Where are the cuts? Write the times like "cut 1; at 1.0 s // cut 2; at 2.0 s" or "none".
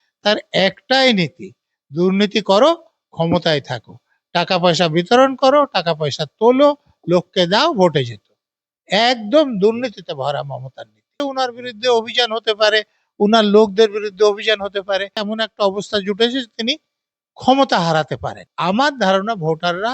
cut 1; at 11.2 s // cut 2; at 15.3 s // cut 3; at 18.5 s